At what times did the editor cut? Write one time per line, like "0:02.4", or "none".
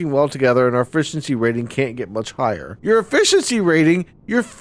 0:02.7